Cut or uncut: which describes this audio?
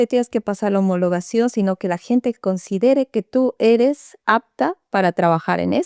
uncut